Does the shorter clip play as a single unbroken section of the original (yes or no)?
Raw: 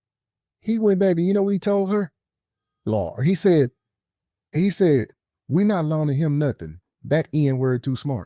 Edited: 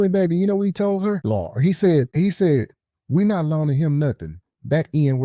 no